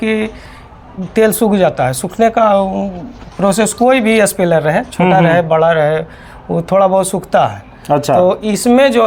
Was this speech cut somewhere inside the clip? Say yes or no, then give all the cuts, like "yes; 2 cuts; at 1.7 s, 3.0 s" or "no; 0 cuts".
no; 0 cuts